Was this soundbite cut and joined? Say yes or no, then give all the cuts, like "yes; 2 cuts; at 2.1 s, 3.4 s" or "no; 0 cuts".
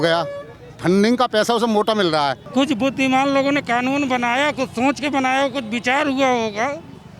yes; 1 cut; at 2.4 s